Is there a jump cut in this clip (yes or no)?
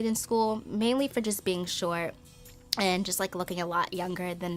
no